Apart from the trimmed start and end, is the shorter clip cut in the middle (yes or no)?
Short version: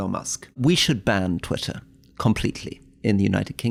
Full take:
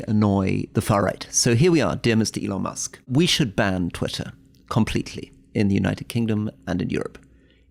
no